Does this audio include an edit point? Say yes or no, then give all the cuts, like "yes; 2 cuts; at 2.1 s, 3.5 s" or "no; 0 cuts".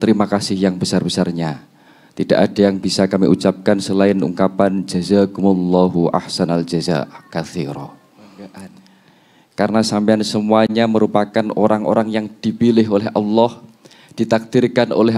yes; 1 cut; at 8.3 s